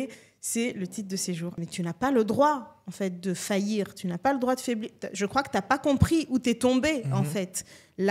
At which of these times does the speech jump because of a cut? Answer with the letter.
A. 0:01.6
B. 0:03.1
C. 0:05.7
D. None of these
A